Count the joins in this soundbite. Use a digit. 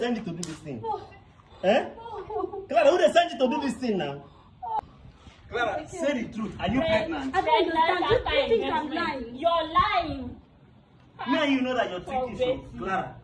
1